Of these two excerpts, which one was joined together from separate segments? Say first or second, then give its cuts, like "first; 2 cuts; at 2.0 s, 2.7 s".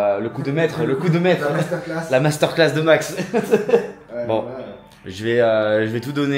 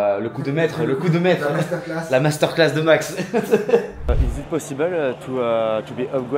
second; 1 cut; at 4.0 s